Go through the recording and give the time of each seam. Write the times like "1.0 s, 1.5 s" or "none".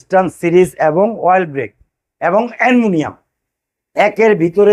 none